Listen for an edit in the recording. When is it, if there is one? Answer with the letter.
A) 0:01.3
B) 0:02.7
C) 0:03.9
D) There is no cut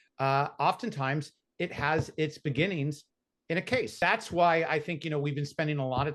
C